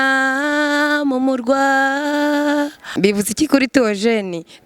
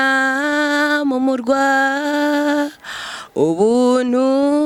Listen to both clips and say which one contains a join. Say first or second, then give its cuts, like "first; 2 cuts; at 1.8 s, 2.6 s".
first; 1 cut; at 2.8 s